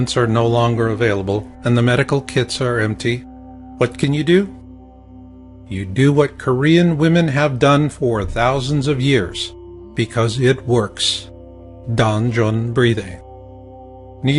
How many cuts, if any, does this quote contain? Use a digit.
1